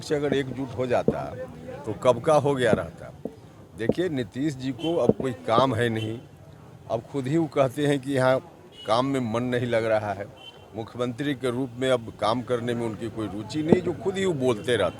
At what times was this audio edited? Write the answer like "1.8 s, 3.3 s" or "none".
none